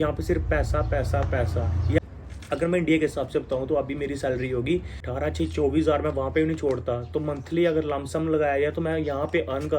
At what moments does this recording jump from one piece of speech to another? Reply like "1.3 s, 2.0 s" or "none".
2.0 s, 5.1 s